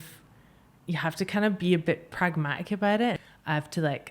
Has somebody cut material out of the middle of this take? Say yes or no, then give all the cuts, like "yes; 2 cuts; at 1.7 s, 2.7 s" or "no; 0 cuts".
yes; 1 cut; at 3.2 s